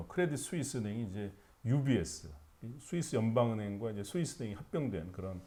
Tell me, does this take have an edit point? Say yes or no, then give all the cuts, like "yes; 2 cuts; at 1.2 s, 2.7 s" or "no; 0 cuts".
no; 0 cuts